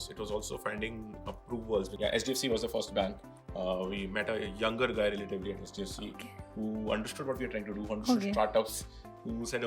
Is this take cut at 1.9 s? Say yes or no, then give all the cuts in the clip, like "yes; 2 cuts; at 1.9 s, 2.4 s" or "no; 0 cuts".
yes; 1 cut; at 1.9 s